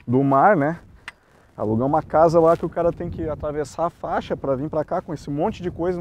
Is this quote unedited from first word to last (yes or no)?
yes